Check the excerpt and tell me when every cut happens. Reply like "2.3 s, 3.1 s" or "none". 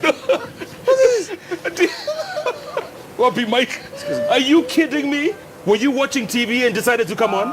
1.4 s